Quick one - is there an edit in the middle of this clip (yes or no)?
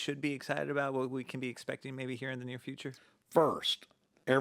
yes